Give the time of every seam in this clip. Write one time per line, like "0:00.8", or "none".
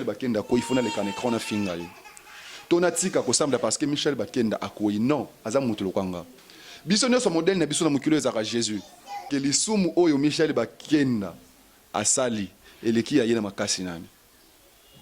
0:09.3